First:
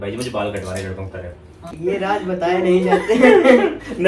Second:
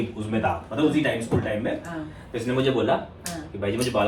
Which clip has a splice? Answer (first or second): first